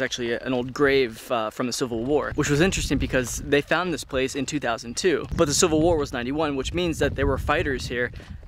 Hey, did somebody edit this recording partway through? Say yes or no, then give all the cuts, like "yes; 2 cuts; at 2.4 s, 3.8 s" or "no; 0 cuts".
yes; 1 cut; at 2.3 s